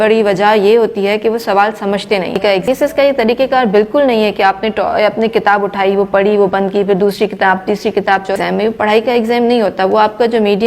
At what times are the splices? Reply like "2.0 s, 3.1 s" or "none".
2.7 s, 8.4 s